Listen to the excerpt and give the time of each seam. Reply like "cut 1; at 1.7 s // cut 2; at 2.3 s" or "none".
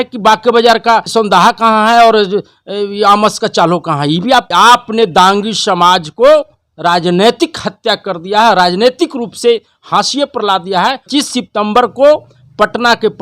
cut 1; at 1.1 s // cut 2; at 4.5 s // cut 3; at 11.0 s